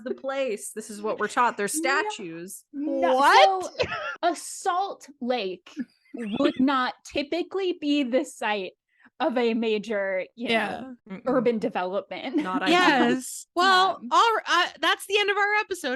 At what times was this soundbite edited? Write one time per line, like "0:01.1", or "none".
0:04.0

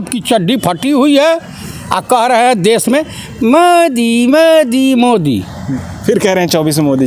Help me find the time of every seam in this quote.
none

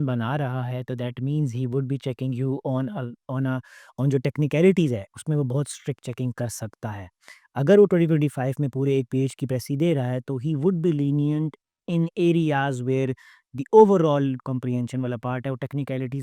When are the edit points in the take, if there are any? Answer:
none

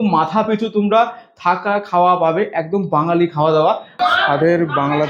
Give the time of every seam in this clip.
0:03.9

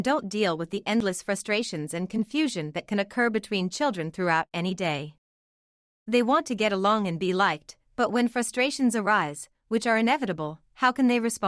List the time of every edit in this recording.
0:01.4

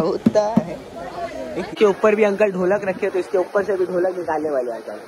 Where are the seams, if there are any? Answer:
0:01.7

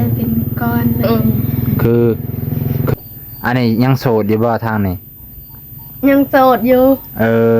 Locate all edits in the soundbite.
0:02.9

